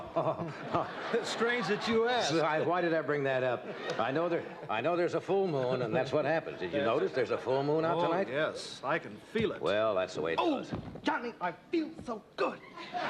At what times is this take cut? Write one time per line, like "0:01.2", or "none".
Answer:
0:09.0